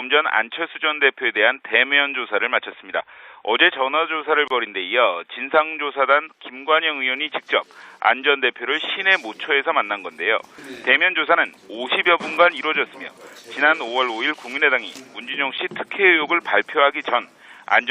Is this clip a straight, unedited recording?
no; 1 cut; at 9.2 s

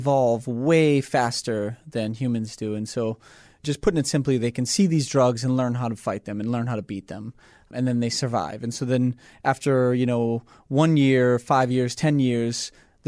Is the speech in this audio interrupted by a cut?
yes; 2 cuts; at 3.6 s, 7.7 s

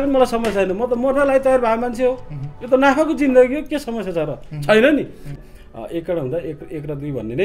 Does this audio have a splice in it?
yes; 1 cut; at 5.2 s

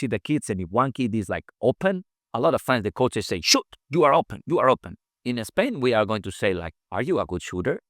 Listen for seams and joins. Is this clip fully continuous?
no; 1 cut; at 4.4 s

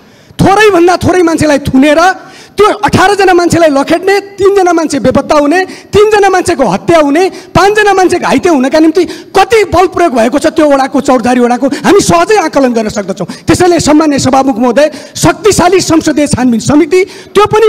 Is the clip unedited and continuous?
yes; 0 cuts

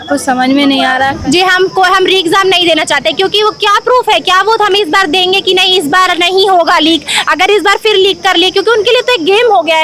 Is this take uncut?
no; 1 cut; at 1.2 s

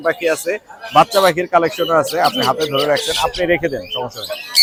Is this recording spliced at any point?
no; 0 cuts

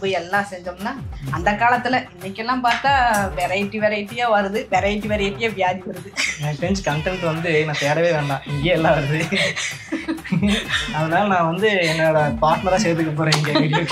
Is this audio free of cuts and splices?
yes; 0 cuts

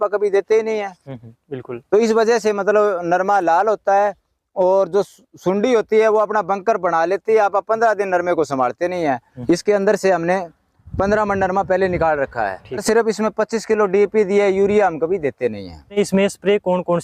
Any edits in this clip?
yes; 3 cuts; at 9.3 s, 12.8 s, 15.9 s

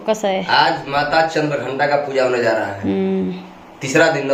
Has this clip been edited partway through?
no; 0 cuts

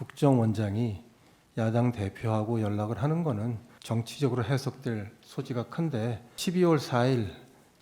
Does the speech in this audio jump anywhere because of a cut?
yes; 2 cuts; at 3.7 s, 6.3 s

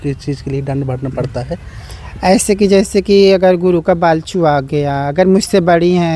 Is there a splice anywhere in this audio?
no; 0 cuts

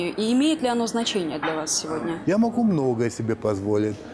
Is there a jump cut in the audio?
yes; 1 cut; at 2.2 s

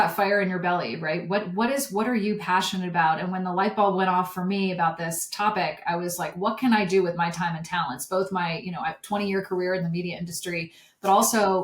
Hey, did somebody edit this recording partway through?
no; 0 cuts

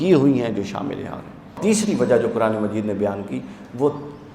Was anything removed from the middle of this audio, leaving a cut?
yes; 1 cut; at 1.6 s

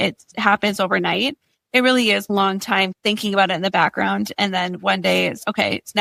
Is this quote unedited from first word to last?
yes; 0 cuts

